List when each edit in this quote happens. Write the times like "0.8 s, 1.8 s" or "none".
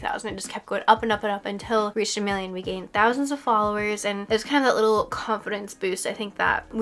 none